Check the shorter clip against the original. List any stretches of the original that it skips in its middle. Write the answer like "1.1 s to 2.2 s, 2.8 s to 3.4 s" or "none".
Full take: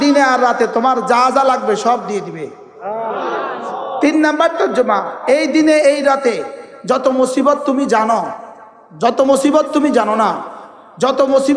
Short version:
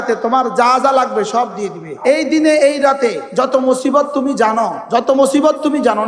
2.4 s to 5.1 s, 6.5 s to 6.7 s, 8.3 s to 8.9 s